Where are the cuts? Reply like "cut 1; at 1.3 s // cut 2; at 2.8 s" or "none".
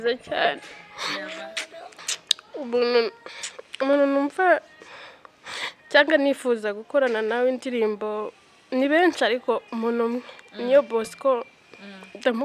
cut 1; at 1.9 s